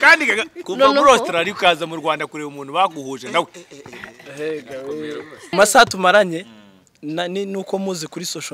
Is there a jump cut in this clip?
yes; 1 cut; at 5.5 s

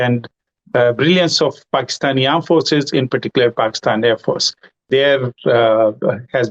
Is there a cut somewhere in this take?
yes; 1 cut; at 4.9 s

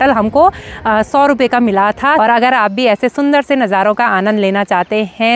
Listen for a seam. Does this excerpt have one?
yes; 1 cut; at 2.2 s

